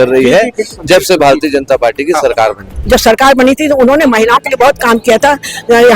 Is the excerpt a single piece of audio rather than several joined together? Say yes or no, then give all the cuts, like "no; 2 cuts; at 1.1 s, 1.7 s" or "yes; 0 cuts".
no; 1 cut; at 2.7 s